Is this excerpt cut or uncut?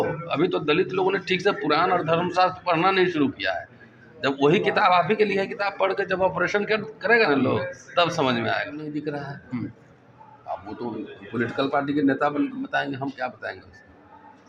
cut